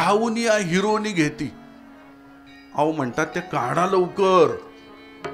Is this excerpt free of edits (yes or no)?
yes